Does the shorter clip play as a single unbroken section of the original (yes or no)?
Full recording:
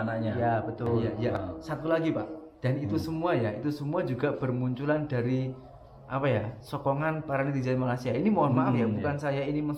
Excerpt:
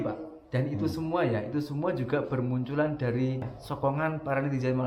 no